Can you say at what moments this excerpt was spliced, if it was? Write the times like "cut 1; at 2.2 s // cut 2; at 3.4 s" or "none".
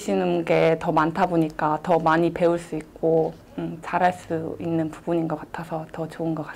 none